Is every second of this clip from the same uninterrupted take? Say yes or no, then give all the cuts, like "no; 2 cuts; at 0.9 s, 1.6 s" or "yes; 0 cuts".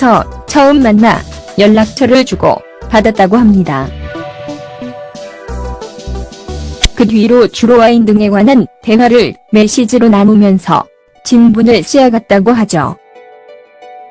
no; 1 cut; at 12.7 s